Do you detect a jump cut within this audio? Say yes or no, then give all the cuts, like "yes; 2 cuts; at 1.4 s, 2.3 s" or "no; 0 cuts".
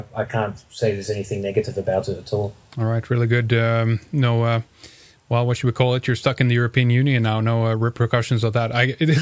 yes; 1 cut; at 3.1 s